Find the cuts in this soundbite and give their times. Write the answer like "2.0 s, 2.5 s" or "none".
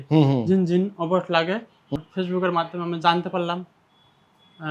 1.9 s